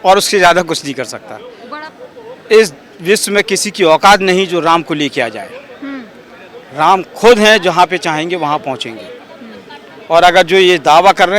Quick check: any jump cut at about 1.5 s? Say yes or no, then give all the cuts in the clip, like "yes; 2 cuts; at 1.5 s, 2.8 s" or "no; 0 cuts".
yes; 1 cut; at 1.5 s